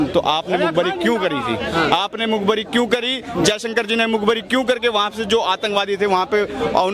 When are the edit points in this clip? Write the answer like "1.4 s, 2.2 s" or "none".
none